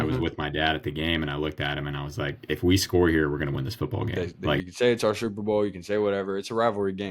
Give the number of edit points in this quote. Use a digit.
1